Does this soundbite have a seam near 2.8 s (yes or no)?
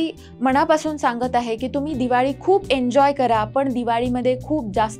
no